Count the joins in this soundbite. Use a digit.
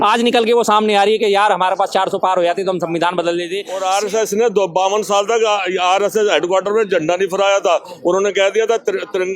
1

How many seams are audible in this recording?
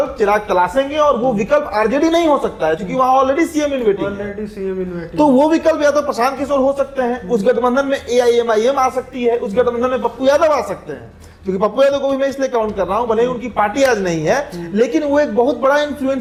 0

